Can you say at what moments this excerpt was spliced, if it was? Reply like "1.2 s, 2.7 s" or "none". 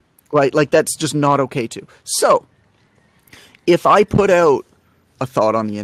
none

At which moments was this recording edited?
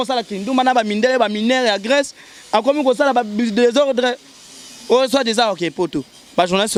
none

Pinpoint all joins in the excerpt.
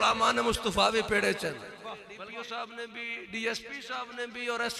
2.1 s

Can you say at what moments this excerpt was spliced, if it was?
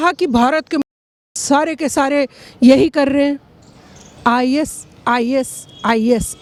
none

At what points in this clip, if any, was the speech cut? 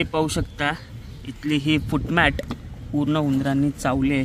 none

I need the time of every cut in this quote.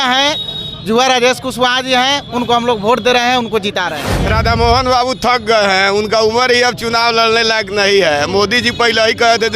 4.1 s

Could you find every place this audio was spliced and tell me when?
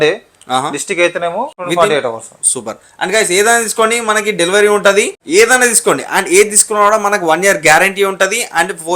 1.6 s, 5.2 s

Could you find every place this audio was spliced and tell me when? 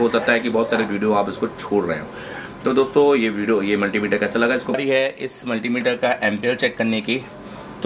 4.8 s

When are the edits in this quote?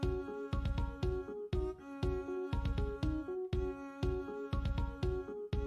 none

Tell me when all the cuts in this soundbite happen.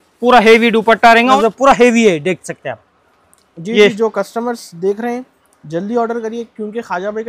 1.4 s

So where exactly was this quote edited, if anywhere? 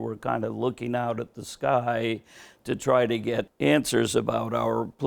3.5 s

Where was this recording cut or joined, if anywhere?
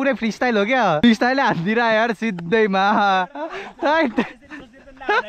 1.0 s

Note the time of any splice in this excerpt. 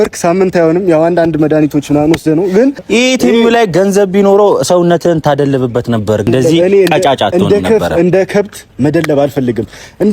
2.8 s

